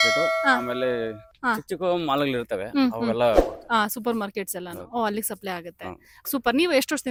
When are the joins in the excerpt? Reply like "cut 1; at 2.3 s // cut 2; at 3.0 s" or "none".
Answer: none